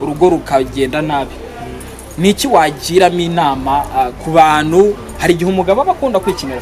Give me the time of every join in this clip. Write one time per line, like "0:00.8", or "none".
none